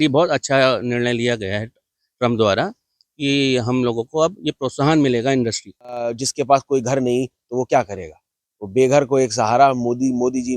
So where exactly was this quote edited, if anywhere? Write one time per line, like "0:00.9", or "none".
0:06.2